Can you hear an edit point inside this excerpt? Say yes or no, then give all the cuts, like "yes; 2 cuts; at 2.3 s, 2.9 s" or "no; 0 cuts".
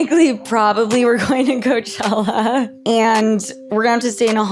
yes; 1 cut; at 2.7 s